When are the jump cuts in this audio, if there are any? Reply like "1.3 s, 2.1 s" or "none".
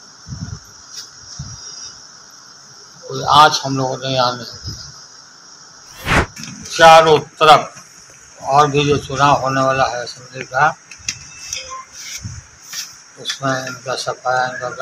6.3 s